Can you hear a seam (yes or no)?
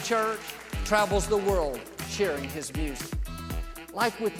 no